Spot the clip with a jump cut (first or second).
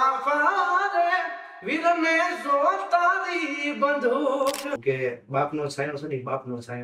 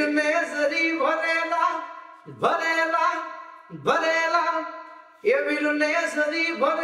first